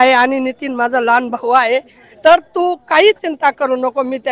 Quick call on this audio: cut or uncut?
uncut